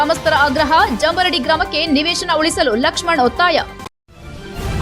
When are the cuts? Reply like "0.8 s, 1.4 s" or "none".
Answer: 3.8 s